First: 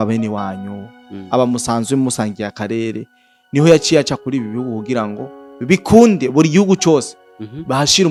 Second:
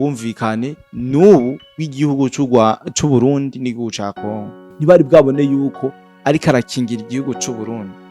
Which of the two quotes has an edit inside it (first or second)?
second